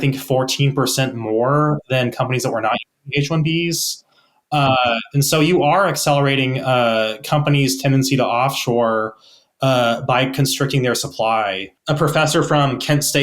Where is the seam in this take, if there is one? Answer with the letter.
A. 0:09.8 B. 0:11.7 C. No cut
B